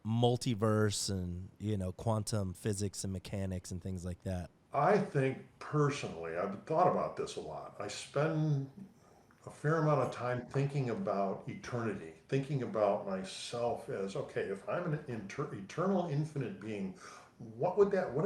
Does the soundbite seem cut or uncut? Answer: cut